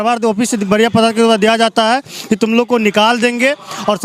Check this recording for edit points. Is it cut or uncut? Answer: uncut